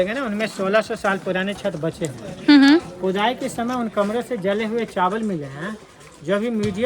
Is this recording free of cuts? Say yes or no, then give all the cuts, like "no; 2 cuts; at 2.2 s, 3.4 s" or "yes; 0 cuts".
yes; 0 cuts